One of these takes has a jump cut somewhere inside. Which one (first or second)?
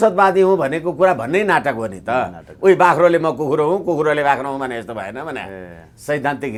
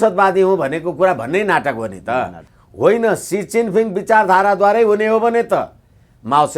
second